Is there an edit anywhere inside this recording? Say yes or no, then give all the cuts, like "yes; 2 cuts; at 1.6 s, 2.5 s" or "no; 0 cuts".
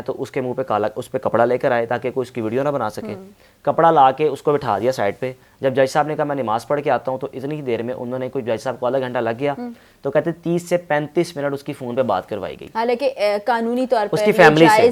no; 0 cuts